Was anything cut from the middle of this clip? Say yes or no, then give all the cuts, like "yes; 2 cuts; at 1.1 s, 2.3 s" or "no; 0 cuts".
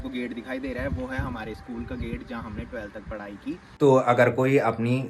yes; 1 cut; at 3.7 s